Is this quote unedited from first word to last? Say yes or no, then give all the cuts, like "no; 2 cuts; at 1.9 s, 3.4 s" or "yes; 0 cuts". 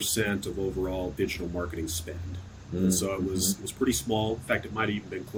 yes; 0 cuts